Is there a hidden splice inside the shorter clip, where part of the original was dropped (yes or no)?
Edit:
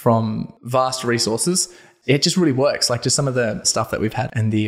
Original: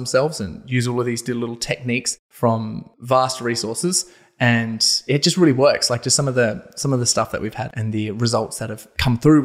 yes